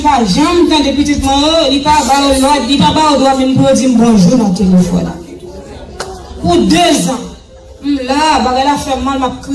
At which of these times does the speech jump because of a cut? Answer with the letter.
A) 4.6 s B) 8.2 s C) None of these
B